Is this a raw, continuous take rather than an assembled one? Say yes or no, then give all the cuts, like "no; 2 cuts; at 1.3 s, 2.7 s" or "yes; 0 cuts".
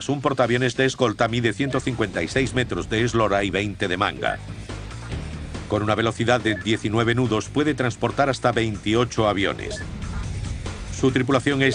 no; 1 cut; at 9.1 s